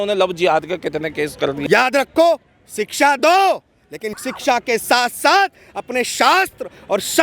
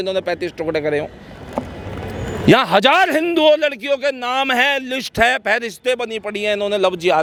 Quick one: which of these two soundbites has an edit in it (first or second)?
first